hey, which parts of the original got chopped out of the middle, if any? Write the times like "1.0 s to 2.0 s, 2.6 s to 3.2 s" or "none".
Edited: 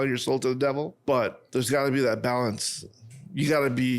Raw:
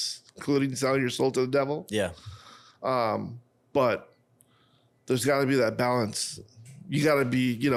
1.9 s to 4.5 s